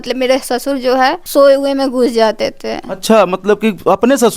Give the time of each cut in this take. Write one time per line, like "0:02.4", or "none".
0:01.2